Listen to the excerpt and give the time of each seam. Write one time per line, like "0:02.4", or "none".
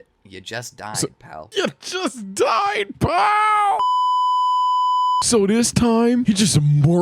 0:01.5

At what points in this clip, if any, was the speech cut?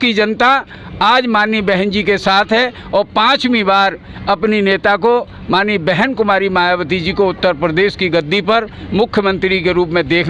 none

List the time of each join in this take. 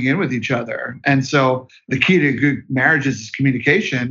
0:01.9

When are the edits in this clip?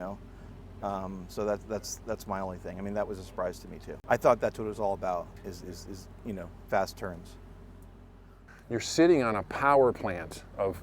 0:03.9
0:08.5

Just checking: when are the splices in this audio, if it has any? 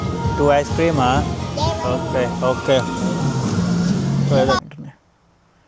0:04.6

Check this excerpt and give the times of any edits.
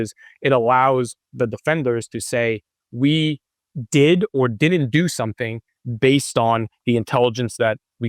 none

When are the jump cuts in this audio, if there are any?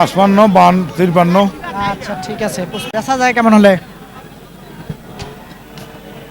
0:02.9

